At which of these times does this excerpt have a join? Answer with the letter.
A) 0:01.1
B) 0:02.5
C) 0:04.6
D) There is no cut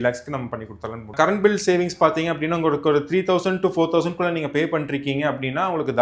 A